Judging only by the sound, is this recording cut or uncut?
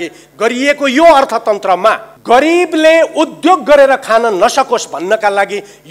cut